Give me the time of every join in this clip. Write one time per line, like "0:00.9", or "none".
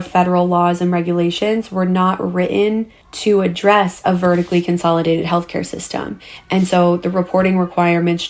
none